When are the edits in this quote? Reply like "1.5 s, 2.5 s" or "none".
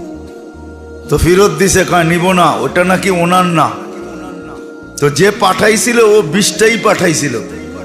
1.1 s